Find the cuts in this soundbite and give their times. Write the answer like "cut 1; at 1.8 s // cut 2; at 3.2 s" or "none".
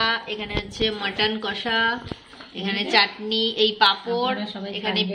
none

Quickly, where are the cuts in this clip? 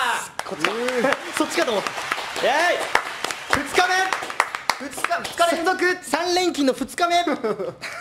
cut 1; at 5.6 s

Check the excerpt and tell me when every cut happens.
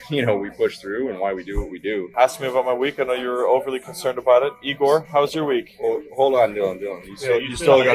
cut 1; at 2.1 s

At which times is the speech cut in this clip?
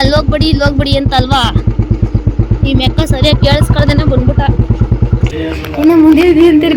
cut 1; at 5.3 s

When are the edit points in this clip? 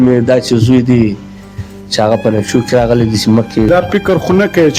cut 1; at 3.7 s

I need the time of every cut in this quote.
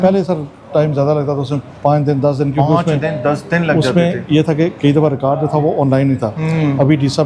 none

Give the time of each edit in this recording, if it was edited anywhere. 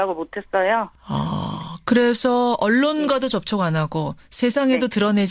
none

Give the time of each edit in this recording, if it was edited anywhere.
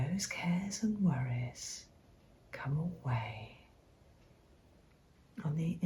cut 1; at 4.8 s

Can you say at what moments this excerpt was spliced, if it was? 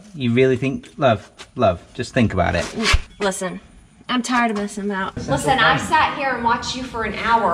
cut 1; at 3.1 s // cut 2; at 5.2 s

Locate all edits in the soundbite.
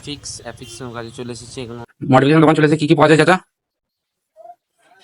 cut 1; at 1.8 s

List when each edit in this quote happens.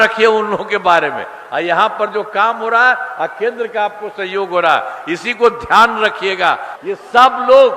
cut 1; at 6.7 s

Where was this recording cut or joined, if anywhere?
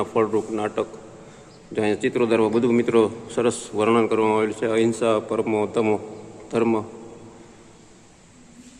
none

